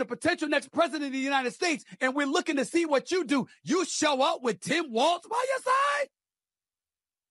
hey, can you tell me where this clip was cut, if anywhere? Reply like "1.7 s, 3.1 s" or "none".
none